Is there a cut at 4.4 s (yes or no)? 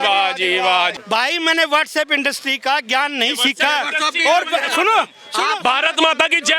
no